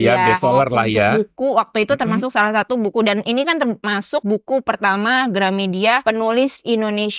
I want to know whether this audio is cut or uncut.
cut